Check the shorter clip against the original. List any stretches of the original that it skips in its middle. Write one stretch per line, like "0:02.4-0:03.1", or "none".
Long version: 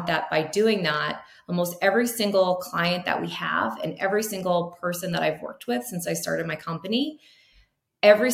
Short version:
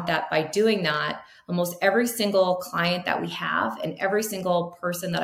none